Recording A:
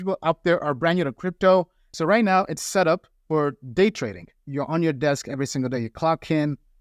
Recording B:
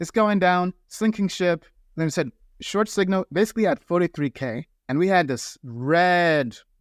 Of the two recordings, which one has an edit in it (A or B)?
A